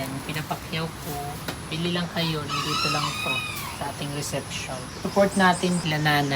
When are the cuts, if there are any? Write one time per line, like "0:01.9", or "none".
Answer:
0:01.7
0:04.9